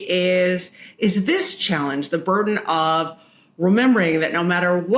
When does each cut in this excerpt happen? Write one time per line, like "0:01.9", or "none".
none